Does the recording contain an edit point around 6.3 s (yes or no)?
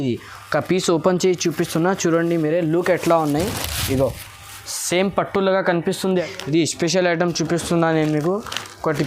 yes